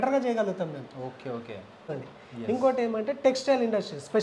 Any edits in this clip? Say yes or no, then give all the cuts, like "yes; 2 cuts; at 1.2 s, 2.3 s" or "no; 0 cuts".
yes; 1 cut; at 1.9 s